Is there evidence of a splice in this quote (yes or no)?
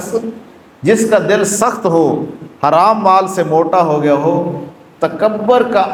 no